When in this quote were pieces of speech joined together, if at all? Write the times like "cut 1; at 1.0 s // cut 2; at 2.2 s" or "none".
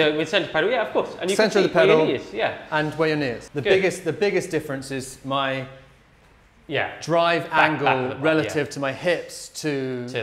cut 1; at 3.4 s